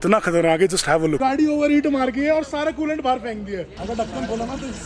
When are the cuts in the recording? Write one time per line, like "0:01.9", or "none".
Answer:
0:01.2
0:03.8